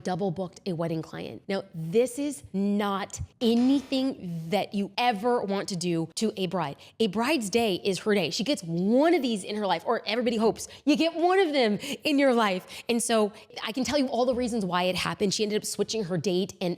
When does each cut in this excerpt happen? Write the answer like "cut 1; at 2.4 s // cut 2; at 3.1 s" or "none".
cut 1; at 2.4 s // cut 2; at 3.2 s // cut 3; at 4.9 s // cut 4; at 6.1 s